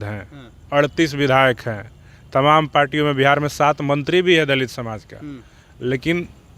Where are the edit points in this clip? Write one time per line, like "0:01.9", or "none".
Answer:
none